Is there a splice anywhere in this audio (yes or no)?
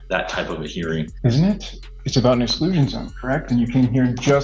yes